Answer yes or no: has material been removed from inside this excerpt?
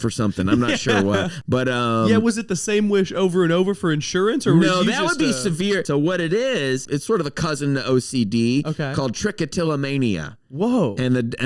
yes